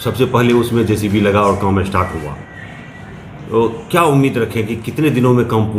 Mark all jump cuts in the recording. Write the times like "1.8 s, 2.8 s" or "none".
none